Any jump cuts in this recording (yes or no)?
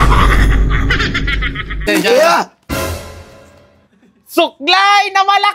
yes